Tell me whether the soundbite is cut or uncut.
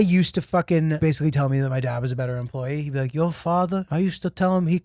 cut